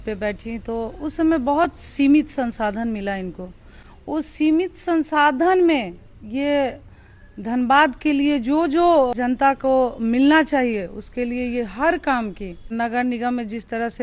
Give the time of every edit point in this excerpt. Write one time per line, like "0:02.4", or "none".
0:09.1
0:12.7